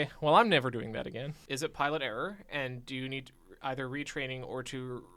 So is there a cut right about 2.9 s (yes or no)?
no